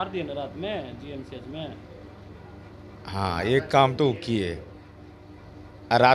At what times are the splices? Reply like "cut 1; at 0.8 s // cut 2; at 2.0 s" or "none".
none